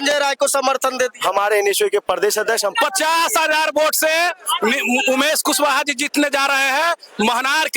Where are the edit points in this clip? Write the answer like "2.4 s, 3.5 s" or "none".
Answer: 2.7 s

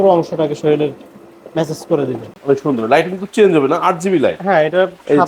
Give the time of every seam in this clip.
2.3 s

